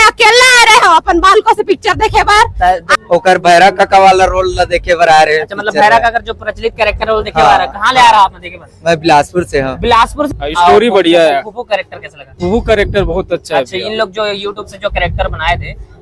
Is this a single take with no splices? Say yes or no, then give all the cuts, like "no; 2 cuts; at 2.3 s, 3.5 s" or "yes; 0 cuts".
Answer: no; 2 cuts; at 2.9 s, 10.3 s